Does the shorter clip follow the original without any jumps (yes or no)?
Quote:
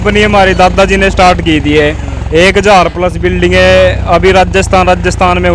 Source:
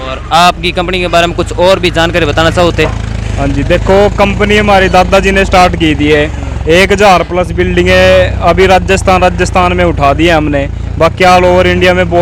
yes